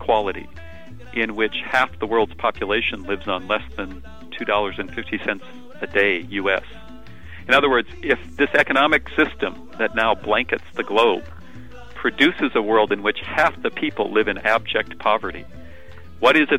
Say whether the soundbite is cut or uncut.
uncut